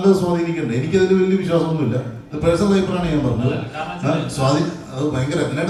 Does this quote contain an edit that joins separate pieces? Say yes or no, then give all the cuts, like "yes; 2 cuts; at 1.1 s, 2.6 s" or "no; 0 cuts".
no; 0 cuts